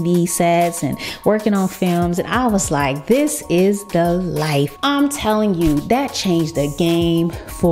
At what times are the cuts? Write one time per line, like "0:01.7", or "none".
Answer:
0:04.7